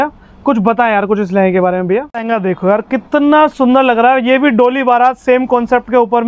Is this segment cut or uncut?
cut